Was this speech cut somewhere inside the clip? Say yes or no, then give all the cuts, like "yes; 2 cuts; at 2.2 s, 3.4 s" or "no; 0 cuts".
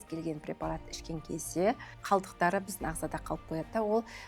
yes; 1 cut; at 1.9 s